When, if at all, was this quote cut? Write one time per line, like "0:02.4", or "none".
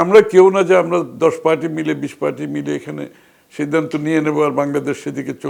none